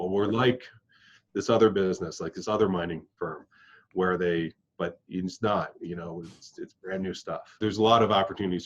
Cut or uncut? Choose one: cut